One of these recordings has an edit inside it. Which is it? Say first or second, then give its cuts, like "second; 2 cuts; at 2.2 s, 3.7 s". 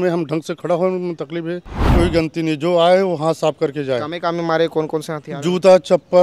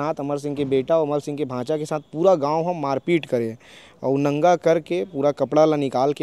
first; 1 cut; at 1.9 s